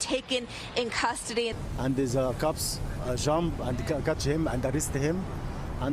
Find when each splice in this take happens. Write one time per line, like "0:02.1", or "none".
0:01.5